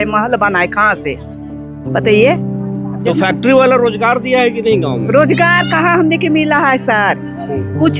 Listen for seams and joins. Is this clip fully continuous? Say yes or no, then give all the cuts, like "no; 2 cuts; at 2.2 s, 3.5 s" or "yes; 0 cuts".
yes; 0 cuts